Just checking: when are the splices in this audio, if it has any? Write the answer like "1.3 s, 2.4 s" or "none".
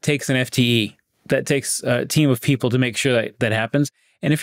none